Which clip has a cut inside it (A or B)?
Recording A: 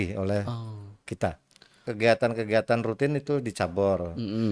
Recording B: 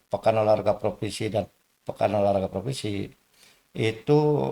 A